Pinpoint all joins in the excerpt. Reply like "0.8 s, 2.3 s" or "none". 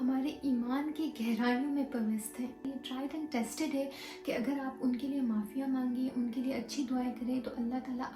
2.7 s